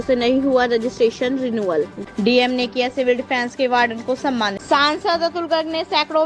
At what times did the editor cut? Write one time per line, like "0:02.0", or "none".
0:01.9
0:04.6